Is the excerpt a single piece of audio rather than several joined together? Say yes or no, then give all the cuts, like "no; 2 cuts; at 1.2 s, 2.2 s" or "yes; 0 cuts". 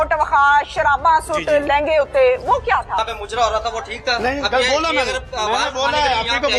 no; 1 cut; at 3.0 s